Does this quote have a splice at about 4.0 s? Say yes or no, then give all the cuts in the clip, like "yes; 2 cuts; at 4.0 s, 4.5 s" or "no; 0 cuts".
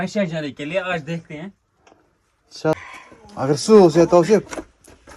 no; 1 cut; at 2.7 s